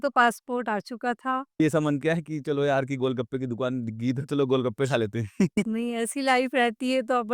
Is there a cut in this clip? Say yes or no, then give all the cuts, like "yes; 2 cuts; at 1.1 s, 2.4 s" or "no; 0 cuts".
yes; 1 cut; at 1.6 s